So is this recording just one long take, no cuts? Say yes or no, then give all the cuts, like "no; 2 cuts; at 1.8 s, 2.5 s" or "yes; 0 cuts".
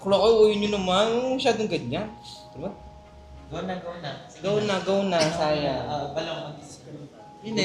yes; 0 cuts